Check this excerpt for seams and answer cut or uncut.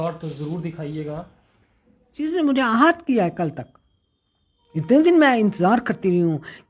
cut